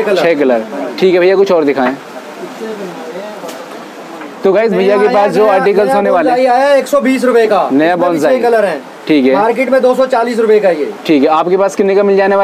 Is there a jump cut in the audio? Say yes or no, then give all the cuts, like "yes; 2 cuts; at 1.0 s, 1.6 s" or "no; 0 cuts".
no; 0 cuts